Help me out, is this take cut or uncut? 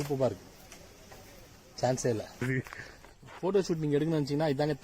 cut